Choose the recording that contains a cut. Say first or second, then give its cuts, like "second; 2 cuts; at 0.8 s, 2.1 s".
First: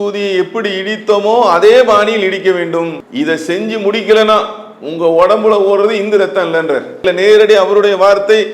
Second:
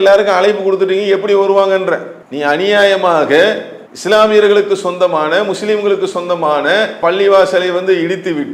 first; 2 cuts; at 3.0 s, 7.0 s